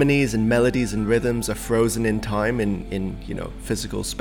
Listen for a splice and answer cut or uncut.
uncut